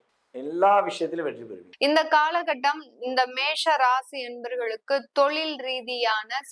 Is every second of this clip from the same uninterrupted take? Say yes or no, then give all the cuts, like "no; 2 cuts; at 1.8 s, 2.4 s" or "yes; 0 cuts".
no; 1 cut; at 1.6 s